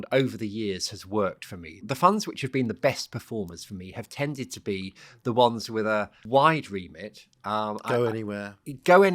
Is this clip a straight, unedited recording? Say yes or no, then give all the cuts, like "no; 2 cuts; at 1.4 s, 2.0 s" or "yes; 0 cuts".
no; 2 cuts; at 1.7 s, 6.2 s